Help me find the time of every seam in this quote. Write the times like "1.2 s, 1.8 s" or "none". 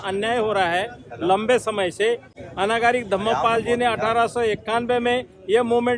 none